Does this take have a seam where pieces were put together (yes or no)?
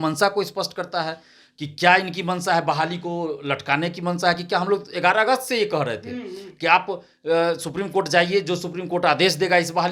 no